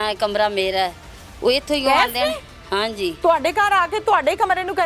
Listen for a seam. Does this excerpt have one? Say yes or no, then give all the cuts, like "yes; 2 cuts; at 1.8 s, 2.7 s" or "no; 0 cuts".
no; 0 cuts